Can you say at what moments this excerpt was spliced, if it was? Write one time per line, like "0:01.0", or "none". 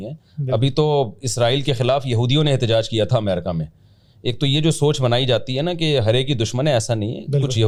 none